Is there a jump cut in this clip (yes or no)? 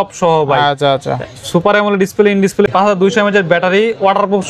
yes